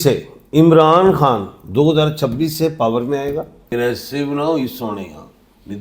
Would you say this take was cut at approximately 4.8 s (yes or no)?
no